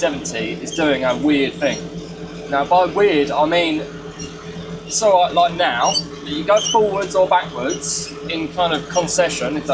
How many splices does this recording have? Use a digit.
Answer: 0